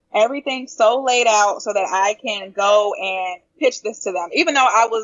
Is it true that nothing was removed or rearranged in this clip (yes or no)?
yes